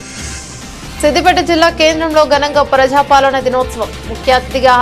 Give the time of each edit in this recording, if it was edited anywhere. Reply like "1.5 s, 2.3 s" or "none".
1.0 s

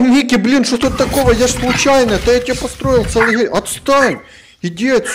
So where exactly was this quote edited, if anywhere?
none

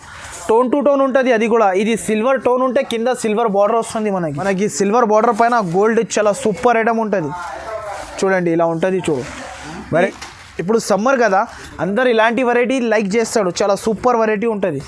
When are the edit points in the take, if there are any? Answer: 4.4 s, 9.9 s

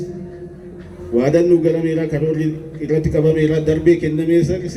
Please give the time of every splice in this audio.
none

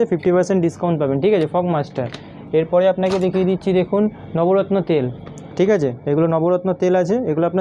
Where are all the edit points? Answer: none

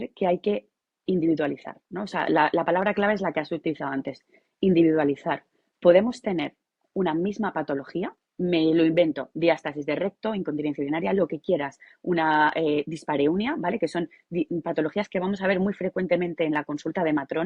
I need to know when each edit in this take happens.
none

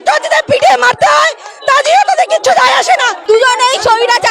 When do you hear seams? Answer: 3.2 s

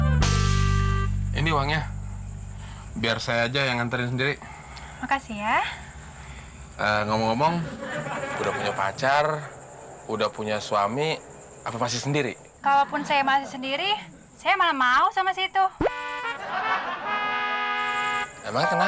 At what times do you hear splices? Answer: none

